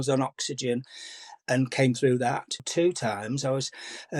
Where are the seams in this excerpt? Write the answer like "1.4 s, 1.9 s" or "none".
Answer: 2.6 s